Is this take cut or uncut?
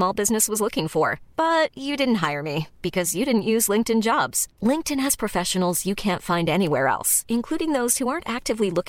uncut